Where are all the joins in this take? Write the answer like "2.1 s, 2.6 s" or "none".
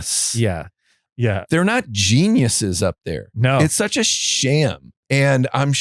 1.1 s, 4.9 s